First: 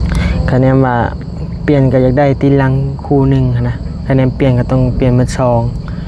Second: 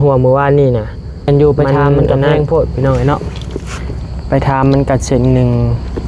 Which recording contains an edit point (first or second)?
second